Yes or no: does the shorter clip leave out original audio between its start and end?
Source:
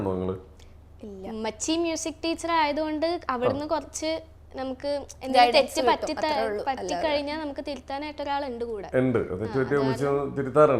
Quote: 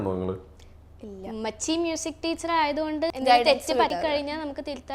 yes